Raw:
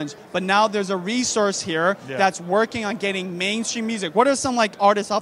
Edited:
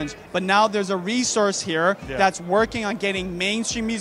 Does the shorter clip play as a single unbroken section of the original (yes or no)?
yes